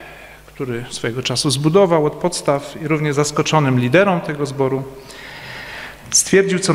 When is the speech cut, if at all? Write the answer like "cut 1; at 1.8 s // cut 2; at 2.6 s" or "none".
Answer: none